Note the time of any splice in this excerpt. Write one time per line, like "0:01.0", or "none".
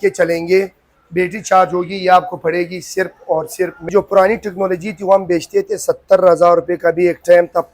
0:03.8